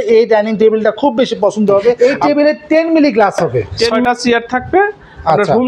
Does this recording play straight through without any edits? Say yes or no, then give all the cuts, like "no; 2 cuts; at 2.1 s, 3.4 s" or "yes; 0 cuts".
no; 2 cuts; at 2.0 s, 4.0 s